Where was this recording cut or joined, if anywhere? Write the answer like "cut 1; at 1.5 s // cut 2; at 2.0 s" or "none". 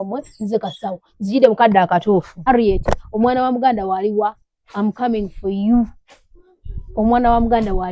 cut 1; at 2.3 s